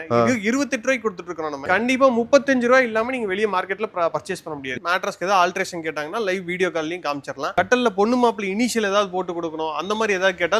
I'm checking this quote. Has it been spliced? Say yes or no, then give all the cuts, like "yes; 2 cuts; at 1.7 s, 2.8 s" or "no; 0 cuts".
yes; 2 cuts; at 1.6 s, 4.7 s